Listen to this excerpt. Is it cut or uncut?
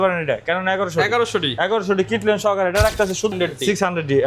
cut